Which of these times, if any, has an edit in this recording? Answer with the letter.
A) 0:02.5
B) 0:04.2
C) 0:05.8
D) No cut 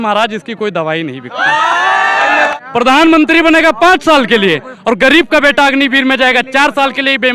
A